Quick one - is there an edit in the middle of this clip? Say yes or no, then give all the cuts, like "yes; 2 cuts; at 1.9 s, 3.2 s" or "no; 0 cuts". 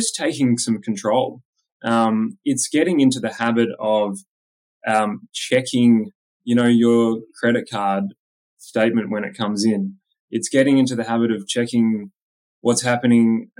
no; 0 cuts